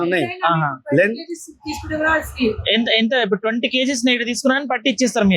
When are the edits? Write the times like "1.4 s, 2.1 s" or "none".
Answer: none